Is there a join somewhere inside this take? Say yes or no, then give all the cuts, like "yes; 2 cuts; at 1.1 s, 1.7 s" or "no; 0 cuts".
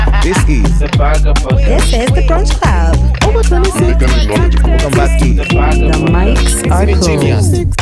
no; 0 cuts